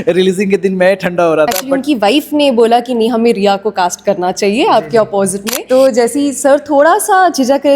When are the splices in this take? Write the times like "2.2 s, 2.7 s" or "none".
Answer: 1.7 s, 5.4 s